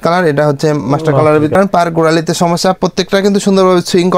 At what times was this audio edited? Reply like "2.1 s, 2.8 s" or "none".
1.5 s

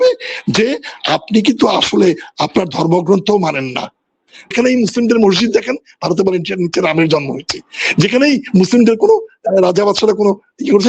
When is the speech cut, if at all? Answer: 4.5 s

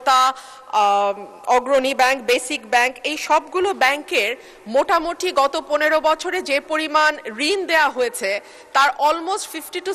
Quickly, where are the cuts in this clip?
none

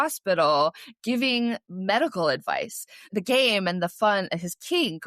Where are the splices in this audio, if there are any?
3.1 s

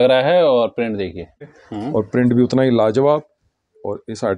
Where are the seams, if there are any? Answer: 1.6 s

